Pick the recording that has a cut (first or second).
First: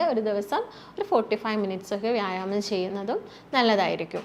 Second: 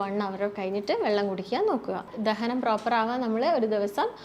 second